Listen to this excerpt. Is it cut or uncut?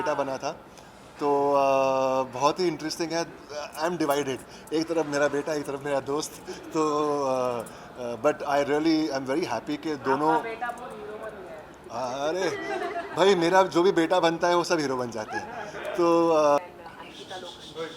cut